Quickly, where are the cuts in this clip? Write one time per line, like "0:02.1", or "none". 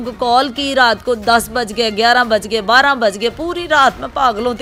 none